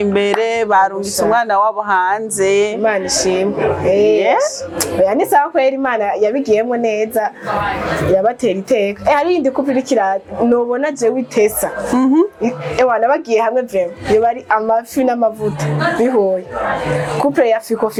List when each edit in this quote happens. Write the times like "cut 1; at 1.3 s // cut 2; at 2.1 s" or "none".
none

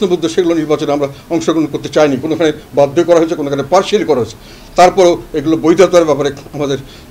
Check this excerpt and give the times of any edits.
none

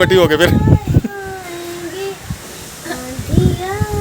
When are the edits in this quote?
cut 1; at 1.1 s

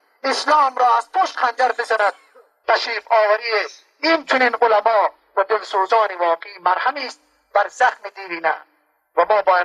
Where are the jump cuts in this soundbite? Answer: none

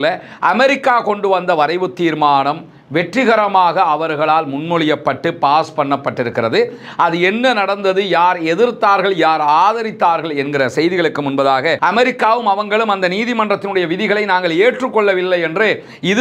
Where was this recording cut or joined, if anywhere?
cut 1; at 11.8 s

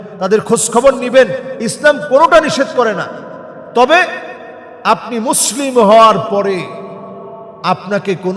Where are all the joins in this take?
none

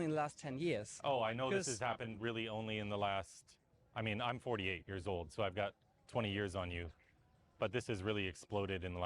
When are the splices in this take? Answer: cut 1; at 7.4 s

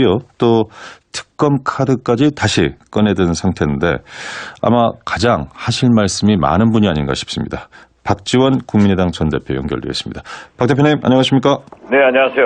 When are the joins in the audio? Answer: cut 1; at 11.0 s

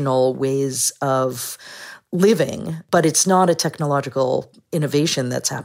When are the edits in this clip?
cut 1; at 2.8 s

